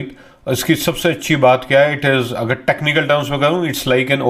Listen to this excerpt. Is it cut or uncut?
uncut